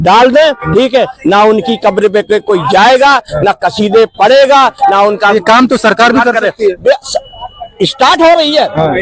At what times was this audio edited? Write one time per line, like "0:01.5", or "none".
none